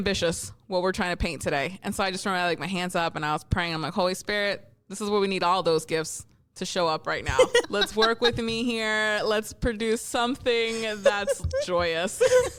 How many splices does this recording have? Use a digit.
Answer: 0